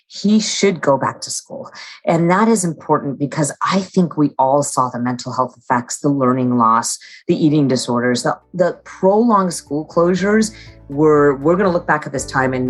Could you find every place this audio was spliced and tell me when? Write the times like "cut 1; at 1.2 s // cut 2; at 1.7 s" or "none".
none